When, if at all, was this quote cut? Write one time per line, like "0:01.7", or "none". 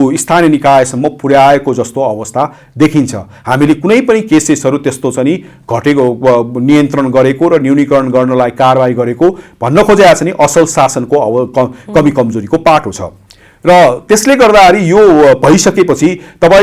none